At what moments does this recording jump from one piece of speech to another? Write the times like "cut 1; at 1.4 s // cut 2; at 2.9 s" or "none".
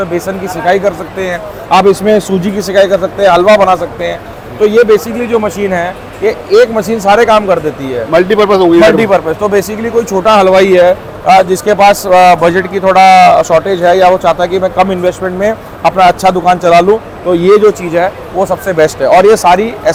none

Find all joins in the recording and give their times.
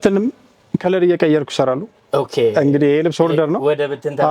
none

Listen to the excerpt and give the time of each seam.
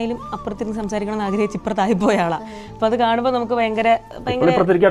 none

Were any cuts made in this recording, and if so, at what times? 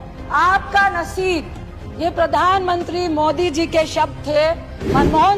none

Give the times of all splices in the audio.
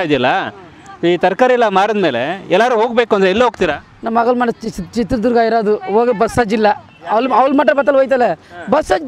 cut 1; at 3.9 s // cut 2; at 6.9 s

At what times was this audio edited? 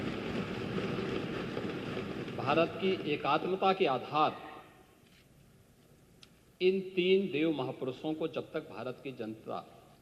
none

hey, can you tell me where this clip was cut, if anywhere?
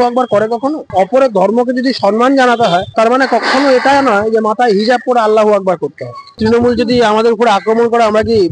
cut 1; at 0.9 s // cut 2; at 6.2 s

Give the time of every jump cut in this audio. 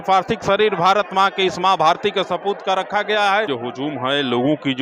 cut 1; at 3.5 s

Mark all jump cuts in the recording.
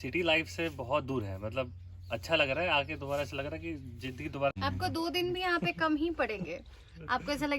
cut 1; at 4.6 s

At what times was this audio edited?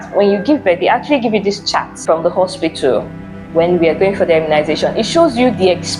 cut 1; at 1.9 s

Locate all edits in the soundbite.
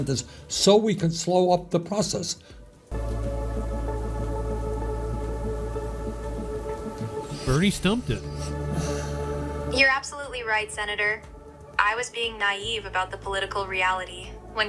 cut 1; at 2.9 s

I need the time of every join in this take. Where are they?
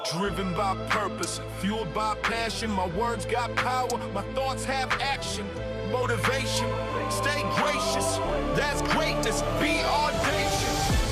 none

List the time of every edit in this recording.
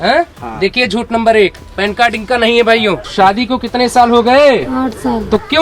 cut 1; at 3.1 s

